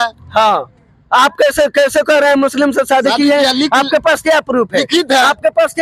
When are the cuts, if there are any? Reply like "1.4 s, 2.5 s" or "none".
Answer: none